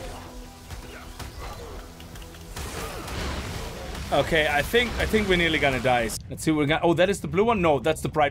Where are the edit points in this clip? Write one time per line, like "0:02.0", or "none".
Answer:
0:06.1